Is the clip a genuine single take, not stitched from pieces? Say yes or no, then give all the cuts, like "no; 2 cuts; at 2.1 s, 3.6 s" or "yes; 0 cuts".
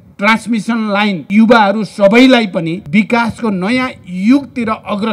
no; 2 cuts; at 1.2 s, 2.8 s